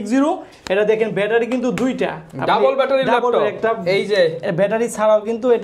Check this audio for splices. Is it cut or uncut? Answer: uncut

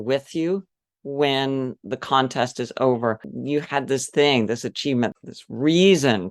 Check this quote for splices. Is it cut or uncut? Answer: cut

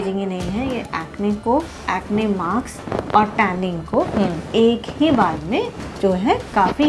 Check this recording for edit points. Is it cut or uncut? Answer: uncut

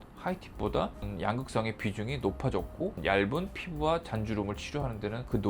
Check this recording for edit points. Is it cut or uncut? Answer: cut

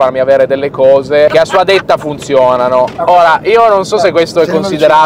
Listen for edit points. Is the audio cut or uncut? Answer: cut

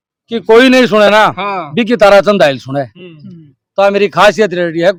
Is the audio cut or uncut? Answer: uncut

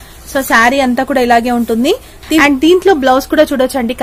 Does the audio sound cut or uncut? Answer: cut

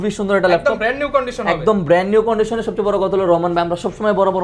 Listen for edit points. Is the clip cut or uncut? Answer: uncut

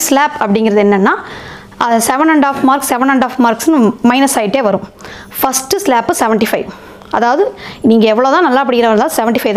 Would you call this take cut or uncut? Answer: uncut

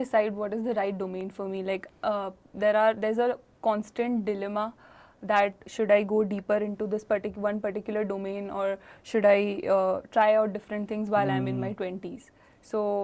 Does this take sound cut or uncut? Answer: uncut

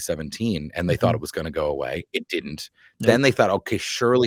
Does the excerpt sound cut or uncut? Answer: uncut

